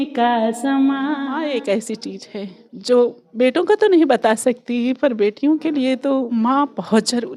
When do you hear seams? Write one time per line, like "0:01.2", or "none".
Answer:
0:01.2
0:02.6
0:06.3